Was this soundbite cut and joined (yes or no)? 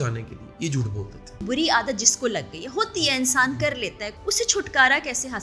yes